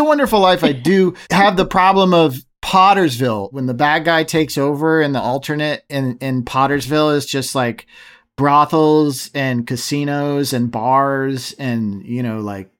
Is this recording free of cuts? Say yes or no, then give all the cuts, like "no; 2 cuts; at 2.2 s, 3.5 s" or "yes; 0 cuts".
no; 1 cut; at 2.5 s